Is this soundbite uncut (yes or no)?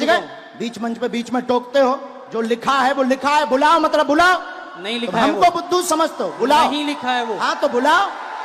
yes